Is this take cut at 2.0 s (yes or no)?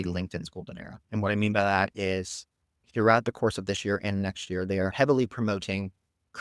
no